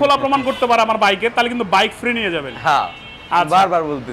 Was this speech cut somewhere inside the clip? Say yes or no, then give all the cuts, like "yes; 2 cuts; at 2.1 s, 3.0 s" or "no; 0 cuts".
no; 0 cuts